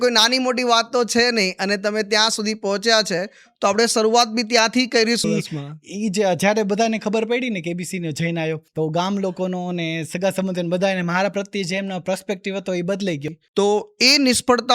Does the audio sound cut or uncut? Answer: cut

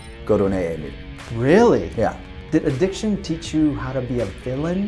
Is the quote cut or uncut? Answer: cut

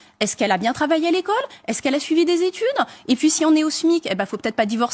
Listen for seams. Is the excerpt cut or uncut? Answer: cut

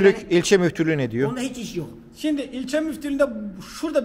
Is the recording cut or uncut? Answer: uncut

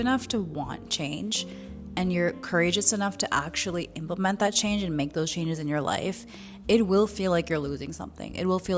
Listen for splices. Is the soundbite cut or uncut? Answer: uncut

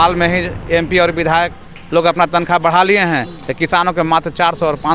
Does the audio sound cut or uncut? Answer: uncut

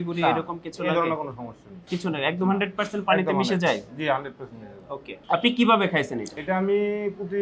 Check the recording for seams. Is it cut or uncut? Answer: cut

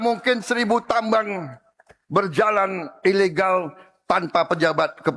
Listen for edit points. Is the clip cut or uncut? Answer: uncut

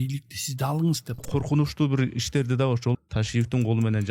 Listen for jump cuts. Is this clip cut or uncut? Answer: cut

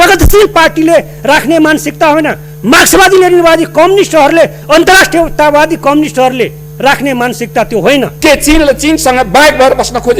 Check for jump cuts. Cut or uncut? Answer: cut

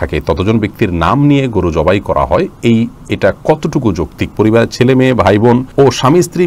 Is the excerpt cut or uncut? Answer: cut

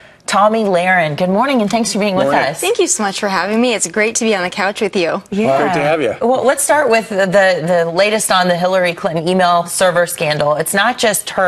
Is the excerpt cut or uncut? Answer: cut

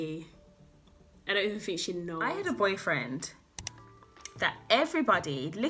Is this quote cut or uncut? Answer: cut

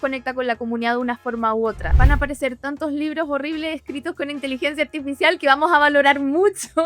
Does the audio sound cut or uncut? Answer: cut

